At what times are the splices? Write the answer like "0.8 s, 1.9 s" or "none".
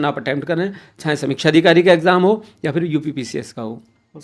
none